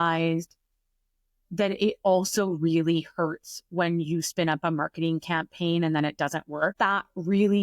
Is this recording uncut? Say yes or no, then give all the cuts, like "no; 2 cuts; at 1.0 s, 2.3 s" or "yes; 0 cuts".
no; 1 cut; at 6.7 s